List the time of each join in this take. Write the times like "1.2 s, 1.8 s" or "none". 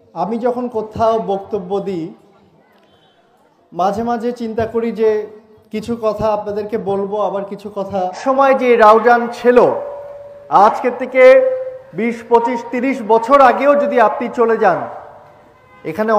8.2 s